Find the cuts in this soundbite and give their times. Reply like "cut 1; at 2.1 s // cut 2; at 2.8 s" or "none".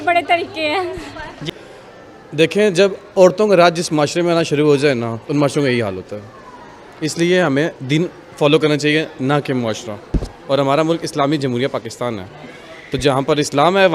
cut 1; at 1.5 s